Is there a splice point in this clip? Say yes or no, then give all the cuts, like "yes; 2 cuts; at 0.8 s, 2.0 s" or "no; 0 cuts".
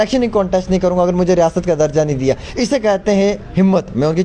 no; 0 cuts